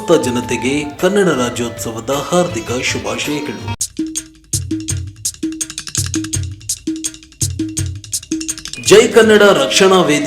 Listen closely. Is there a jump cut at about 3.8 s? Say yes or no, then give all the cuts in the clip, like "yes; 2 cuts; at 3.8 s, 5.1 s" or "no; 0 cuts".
yes; 1 cut; at 3.8 s